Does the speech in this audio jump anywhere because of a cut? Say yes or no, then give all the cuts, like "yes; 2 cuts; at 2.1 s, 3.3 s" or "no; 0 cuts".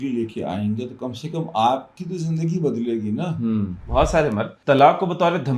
yes; 2 cuts; at 3.8 s, 4.5 s